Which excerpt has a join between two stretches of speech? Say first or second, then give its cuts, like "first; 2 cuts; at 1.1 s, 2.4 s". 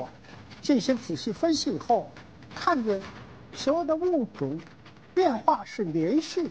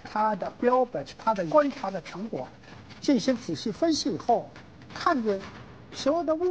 second; 1 cut; at 1.5 s